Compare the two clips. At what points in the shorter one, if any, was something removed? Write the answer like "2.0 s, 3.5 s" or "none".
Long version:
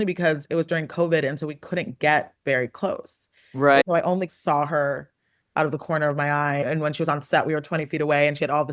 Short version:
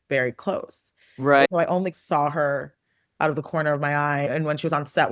none